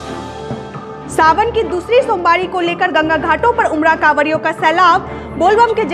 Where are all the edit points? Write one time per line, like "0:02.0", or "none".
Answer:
0:01.0